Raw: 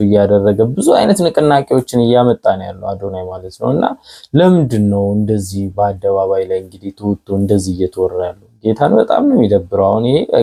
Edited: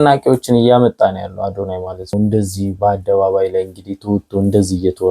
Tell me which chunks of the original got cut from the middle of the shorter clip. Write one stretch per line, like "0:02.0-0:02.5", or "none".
0:03.6-0:05.1